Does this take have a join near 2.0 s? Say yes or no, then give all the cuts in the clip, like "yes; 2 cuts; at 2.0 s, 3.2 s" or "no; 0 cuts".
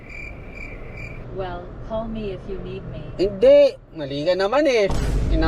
no; 0 cuts